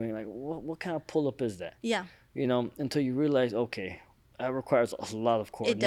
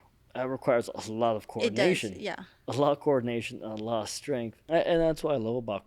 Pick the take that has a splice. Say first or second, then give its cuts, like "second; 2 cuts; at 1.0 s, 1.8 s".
second; 1 cut; at 4.6 s